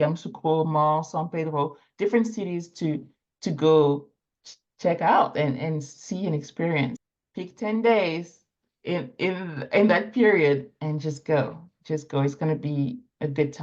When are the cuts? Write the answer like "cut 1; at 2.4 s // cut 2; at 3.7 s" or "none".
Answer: cut 1; at 7.1 s